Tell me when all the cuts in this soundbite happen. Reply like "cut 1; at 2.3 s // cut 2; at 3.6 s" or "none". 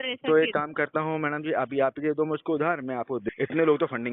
cut 1; at 3.2 s